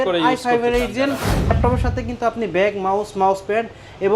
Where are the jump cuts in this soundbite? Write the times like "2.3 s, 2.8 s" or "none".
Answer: 1.5 s